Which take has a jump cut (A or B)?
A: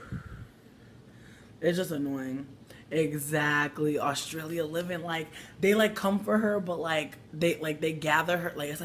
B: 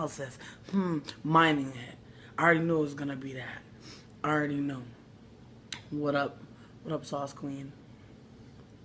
B